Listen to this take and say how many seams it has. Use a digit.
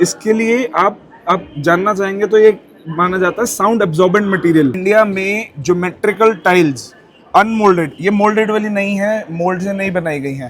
1